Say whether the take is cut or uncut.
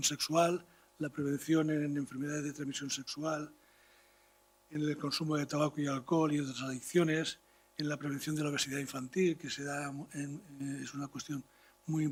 uncut